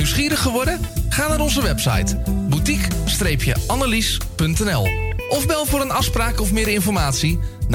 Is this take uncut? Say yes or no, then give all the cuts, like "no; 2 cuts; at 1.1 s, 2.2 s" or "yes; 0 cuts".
yes; 0 cuts